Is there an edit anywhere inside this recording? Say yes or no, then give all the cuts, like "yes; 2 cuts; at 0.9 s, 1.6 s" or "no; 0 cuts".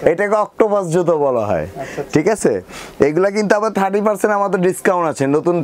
no; 0 cuts